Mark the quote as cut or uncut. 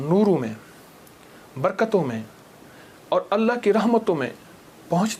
uncut